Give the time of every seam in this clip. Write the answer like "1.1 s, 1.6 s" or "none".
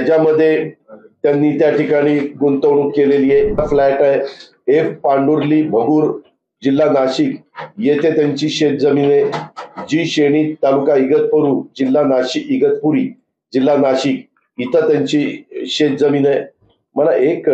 3.6 s